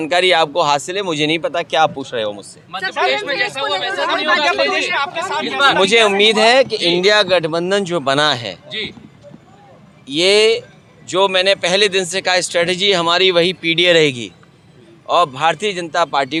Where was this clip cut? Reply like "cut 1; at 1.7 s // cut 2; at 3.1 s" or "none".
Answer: none

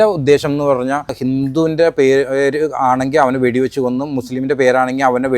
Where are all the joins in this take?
cut 1; at 1.2 s

